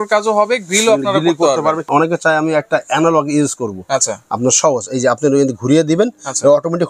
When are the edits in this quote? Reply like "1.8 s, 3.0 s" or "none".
1.8 s

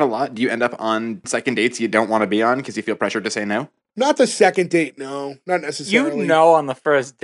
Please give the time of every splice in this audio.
1.2 s, 3.9 s

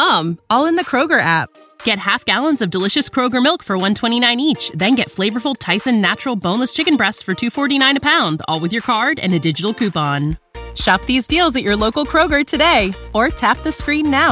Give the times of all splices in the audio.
none

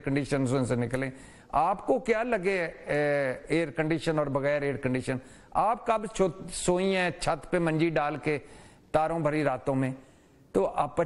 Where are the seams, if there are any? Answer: none

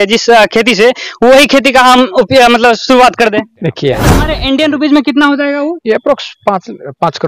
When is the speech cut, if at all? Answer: 4.2 s

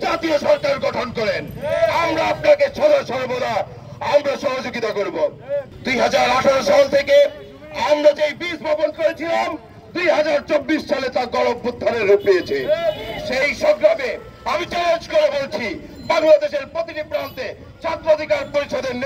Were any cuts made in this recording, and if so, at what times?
none

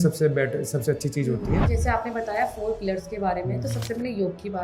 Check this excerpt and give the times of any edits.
1.7 s

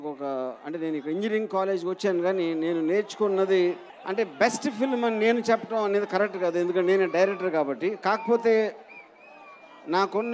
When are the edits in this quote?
3.9 s

